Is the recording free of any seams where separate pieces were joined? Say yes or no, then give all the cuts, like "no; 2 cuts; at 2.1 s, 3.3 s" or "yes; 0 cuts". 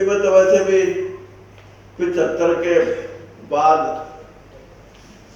yes; 0 cuts